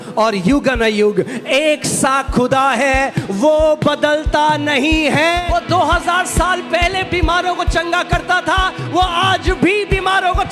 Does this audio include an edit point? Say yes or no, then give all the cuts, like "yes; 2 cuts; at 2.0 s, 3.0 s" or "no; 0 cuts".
yes; 1 cut; at 5.4 s